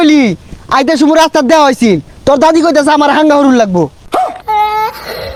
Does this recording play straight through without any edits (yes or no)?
yes